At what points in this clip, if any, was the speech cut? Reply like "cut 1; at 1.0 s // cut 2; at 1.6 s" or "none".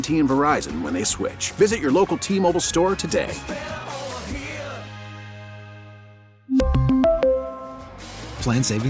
none